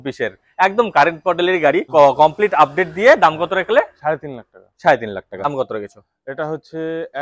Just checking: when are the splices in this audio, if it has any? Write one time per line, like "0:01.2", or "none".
0:01.8
0:05.5